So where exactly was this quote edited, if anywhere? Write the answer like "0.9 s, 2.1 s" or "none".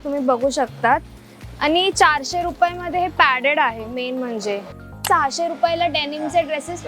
5.0 s